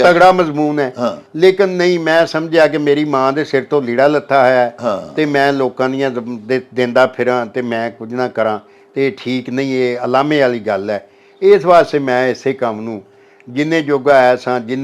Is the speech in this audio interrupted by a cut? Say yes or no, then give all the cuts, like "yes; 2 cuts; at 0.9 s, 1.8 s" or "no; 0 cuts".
no; 0 cuts